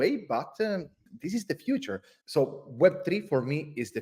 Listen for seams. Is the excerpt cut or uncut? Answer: uncut